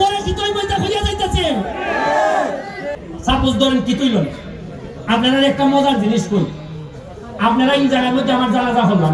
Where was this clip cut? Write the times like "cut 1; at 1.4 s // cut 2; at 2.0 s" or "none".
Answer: cut 1; at 2.9 s